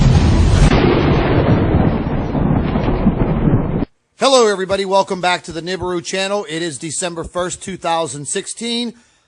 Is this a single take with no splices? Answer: yes; 0 cuts

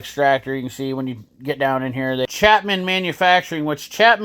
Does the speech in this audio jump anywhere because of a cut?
yes; 1 cut; at 2.3 s

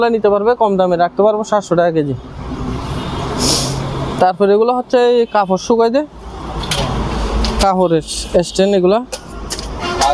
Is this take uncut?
yes; 0 cuts

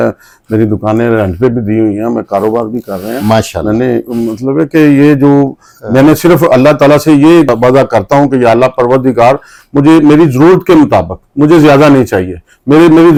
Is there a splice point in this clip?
no; 0 cuts

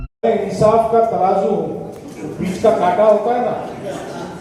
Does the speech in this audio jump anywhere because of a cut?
no; 0 cuts

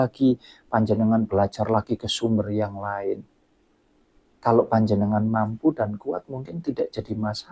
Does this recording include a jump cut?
no; 0 cuts

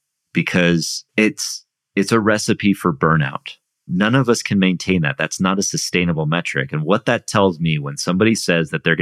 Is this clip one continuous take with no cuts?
no; 2 cuts; at 1.0 s, 3.8 s

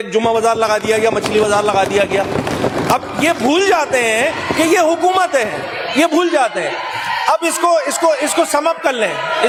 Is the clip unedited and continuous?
yes; 0 cuts

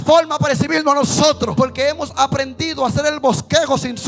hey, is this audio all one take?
no; 1 cut; at 1.5 s

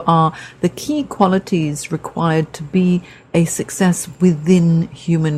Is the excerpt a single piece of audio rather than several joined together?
yes; 0 cuts

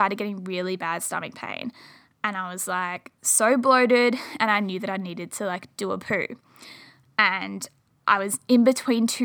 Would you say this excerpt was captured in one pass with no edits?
yes; 0 cuts

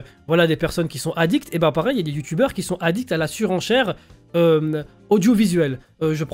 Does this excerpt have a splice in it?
no; 0 cuts

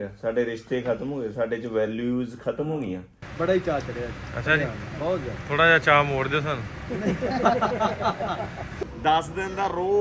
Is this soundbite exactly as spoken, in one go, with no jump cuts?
no; 2 cuts; at 3.2 s, 8.8 s

